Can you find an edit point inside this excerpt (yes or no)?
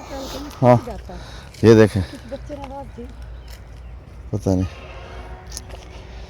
no